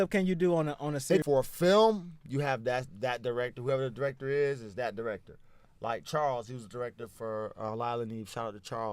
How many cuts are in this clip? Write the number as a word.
one